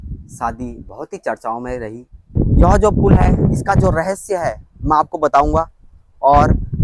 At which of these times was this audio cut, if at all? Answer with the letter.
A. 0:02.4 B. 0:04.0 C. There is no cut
A